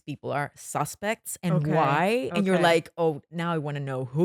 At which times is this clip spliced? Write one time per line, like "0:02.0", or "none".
none